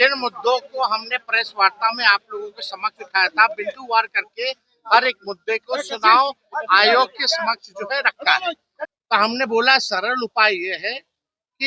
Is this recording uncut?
no; 1 cut; at 8.7 s

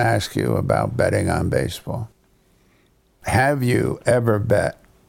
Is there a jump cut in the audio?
no; 0 cuts

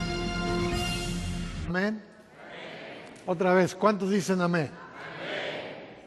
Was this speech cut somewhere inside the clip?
no; 0 cuts

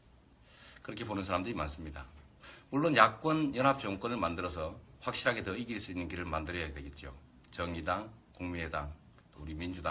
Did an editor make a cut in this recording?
yes; 1 cut; at 4.3 s

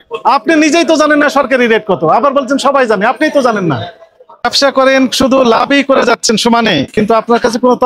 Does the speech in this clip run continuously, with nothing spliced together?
no; 1 cut; at 4.4 s

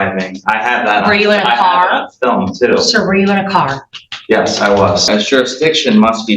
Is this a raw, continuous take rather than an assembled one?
no; 1 cut; at 5.0 s

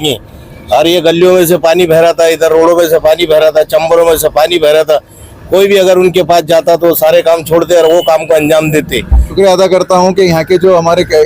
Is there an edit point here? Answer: yes; 1 cut; at 9.3 s

